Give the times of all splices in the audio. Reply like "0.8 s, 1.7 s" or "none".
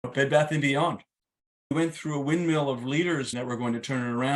1.7 s, 3.4 s